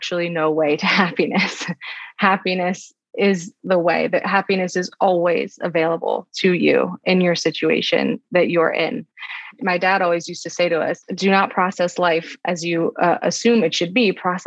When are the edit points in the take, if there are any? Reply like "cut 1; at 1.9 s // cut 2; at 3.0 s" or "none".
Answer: none